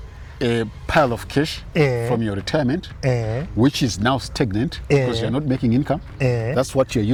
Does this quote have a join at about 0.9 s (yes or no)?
no